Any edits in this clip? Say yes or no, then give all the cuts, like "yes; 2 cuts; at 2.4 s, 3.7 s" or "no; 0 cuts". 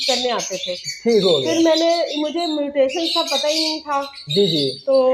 no; 0 cuts